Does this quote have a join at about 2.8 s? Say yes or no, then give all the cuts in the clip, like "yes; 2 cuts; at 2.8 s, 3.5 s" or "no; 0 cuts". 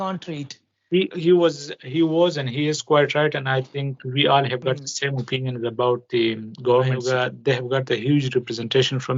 no; 1 cut; at 7.0 s